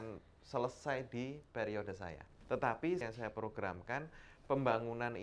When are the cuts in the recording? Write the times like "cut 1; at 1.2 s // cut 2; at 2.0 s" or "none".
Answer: cut 1; at 2.3 s // cut 2; at 3.0 s